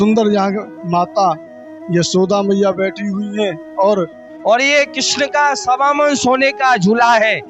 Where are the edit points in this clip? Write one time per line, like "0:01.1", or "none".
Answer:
0:04.2